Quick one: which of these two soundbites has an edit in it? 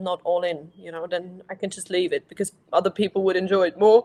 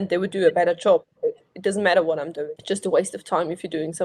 second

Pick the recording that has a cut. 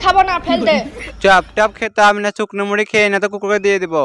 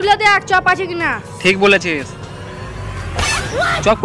first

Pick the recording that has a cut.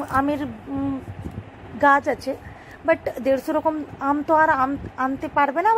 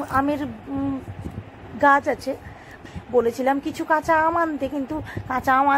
second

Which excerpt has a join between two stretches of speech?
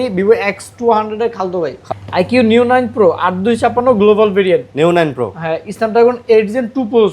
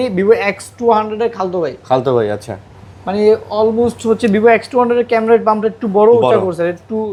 first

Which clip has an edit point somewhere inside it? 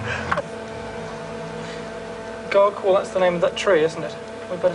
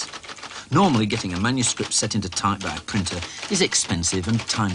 second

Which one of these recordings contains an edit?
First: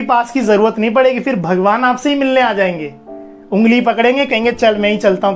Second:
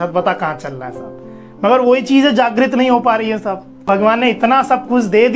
second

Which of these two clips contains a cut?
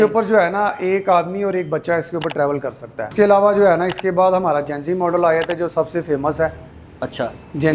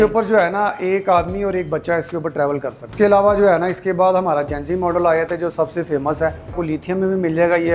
second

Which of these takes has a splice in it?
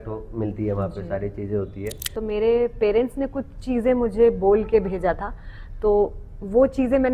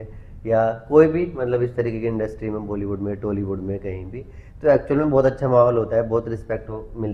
first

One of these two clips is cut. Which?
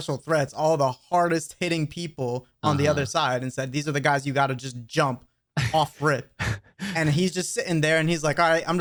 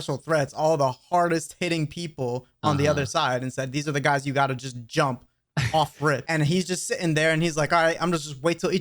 second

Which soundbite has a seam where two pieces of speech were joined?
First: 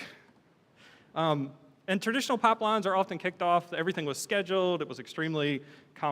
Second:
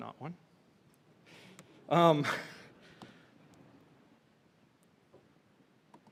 first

